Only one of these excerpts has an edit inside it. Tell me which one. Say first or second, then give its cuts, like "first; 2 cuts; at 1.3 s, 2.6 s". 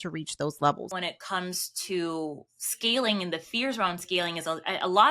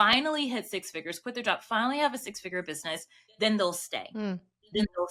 first; 1 cut; at 1.0 s